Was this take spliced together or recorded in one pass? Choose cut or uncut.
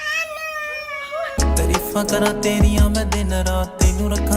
cut